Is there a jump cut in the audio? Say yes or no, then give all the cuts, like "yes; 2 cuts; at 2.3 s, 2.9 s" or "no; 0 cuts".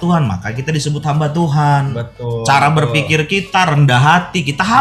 no; 0 cuts